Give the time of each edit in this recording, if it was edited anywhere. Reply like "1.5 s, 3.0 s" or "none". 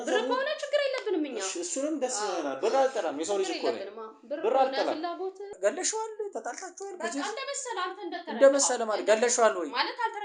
5.5 s